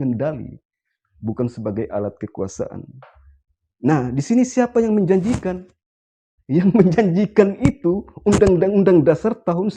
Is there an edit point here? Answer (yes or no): no